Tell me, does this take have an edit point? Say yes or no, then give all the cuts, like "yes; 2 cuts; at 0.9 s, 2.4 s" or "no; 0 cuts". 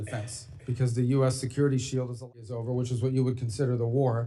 yes; 1 cut; at 2.4 s